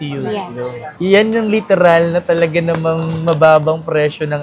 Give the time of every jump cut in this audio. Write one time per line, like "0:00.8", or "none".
0:01.0